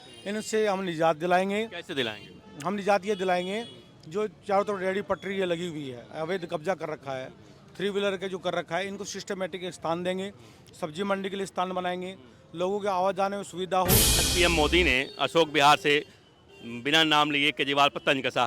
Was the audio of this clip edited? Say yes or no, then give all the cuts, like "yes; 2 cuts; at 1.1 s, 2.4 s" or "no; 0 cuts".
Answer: yes; 1 cut; at 14.3 s